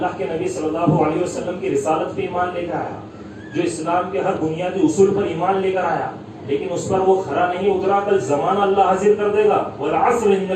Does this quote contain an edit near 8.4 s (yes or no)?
no